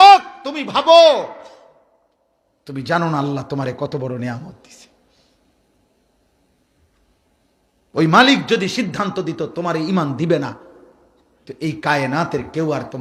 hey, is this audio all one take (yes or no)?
yes